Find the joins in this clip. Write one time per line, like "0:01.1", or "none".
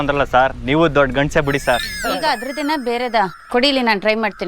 0:01.9